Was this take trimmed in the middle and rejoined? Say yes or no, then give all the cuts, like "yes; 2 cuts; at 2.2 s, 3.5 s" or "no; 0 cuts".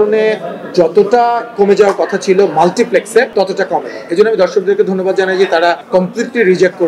yes; 2 cuts; at 3.3 s, 5.8 s